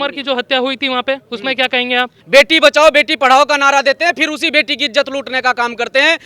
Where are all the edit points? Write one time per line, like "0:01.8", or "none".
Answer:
0:02.2